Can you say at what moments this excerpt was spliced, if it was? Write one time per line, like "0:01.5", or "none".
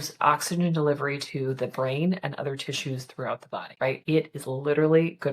0:03.9